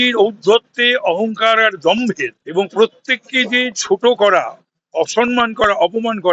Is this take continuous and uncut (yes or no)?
no